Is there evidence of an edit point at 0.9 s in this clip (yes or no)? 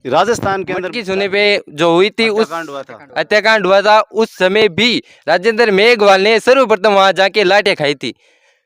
yes